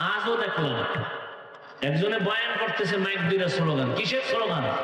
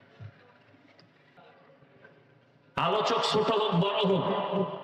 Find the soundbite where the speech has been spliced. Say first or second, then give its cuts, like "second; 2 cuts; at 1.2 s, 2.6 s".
second; 1 cut; at 1.4 s